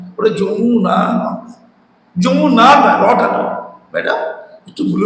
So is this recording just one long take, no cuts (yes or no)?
yes